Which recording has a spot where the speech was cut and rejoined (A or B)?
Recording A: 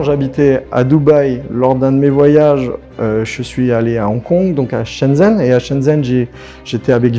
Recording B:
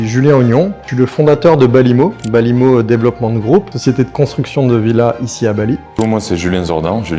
B